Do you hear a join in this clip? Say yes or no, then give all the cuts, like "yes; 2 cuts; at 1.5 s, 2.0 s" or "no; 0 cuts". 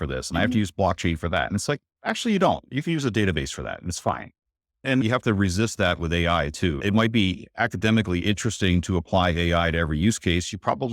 yes; 2 cuts; at 5.0 s, 6.8 s